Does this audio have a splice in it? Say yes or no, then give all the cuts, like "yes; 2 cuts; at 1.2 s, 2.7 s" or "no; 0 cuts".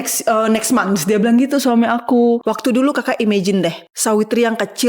yes; 2 cuts; at 2.5 s, 3.9 s